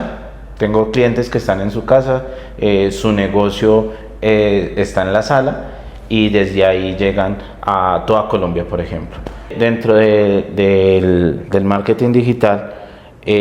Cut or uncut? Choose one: cut